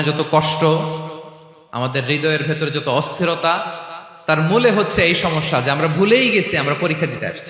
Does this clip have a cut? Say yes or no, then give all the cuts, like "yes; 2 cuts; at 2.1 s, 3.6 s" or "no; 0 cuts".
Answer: no; 0 cuts